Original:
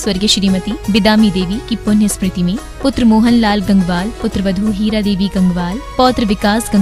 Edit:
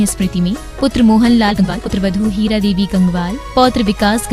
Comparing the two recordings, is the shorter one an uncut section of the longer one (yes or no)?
no